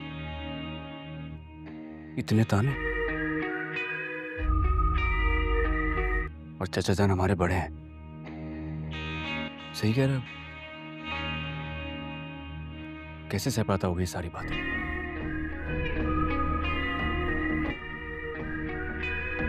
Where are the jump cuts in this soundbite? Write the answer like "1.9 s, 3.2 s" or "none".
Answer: 1.2 s